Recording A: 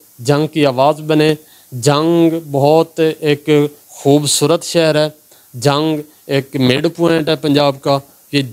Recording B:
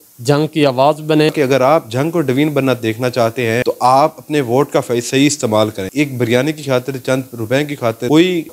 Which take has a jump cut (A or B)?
B